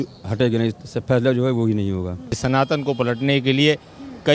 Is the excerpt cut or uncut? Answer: cut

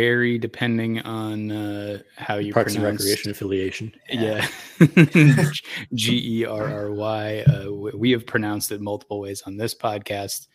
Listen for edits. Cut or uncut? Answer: uncut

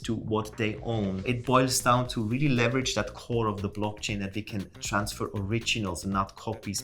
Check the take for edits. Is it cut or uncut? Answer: cut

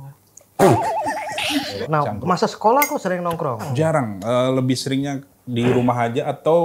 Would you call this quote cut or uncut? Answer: cut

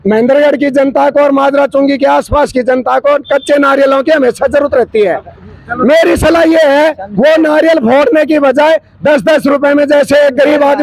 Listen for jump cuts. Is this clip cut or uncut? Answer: uncut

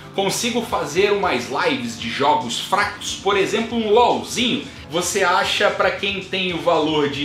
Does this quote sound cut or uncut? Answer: cut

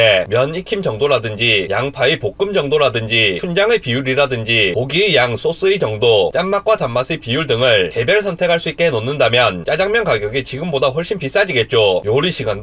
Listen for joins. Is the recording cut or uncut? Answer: cut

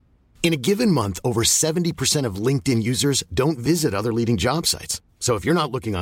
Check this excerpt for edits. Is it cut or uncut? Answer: uncut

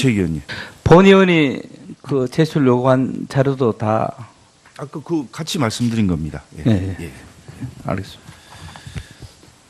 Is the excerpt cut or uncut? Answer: cut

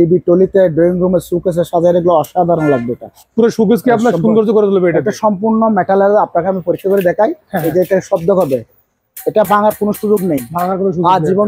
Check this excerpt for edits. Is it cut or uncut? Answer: uncut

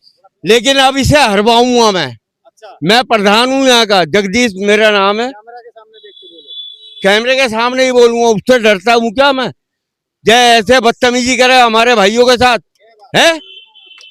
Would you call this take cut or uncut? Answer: uncut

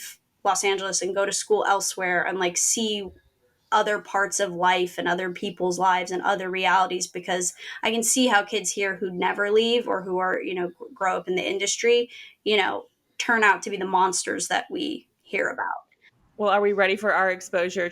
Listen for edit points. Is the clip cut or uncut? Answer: cut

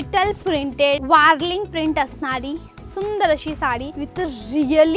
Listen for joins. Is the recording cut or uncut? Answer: cut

